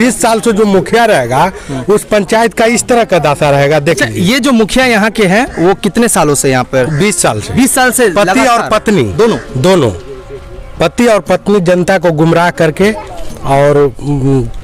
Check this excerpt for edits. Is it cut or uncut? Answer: uncut